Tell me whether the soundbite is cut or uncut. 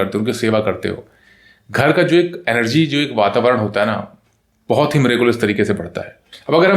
uncut